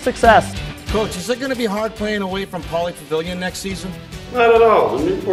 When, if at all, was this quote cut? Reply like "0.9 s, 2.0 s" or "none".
none